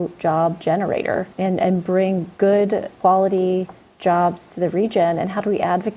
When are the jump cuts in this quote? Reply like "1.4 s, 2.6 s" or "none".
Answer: 2.3 s, 2.9 s